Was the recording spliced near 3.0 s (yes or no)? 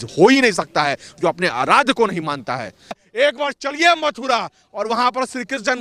yes